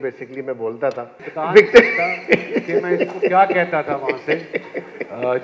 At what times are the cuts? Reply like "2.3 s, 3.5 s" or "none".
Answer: 1.2 s

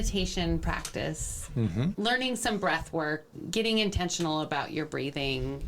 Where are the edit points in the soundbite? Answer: 1.9 s, 3.3 s

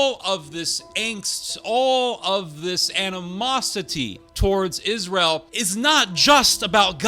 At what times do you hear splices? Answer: 4.2 s, 5.5 s

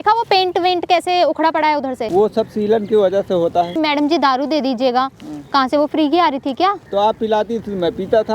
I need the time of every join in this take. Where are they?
2.0 s, 3.7 s, 6.8 s

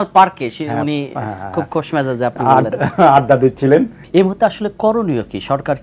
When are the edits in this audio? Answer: 4.0 s

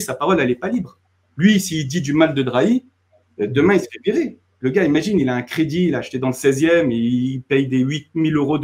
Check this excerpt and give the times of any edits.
none

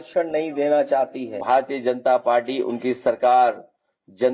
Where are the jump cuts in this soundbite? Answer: 1.4 s

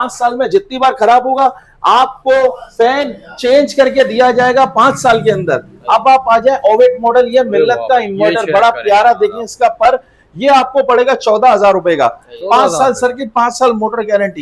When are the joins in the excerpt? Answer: none

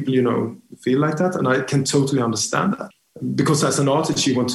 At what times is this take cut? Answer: 2.9 s

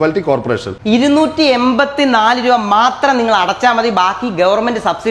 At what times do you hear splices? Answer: none

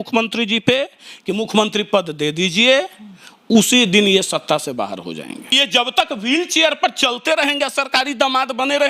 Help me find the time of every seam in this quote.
5.5 s

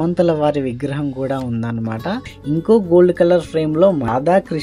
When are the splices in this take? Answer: 2.3 s

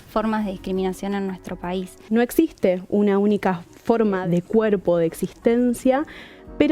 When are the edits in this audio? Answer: 2.0 s, 4.2 s

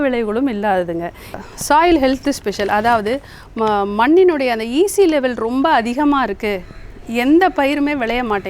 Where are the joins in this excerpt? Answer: 1.3 s

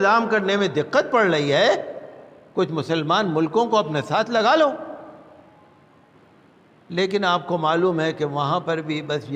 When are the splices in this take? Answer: none

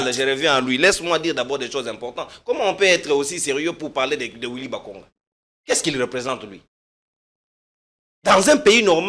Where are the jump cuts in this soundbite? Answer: none

